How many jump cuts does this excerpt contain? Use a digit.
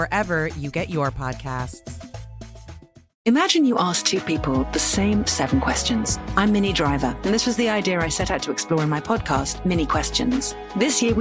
1